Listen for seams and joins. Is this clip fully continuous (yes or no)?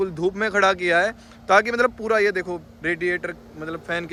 yes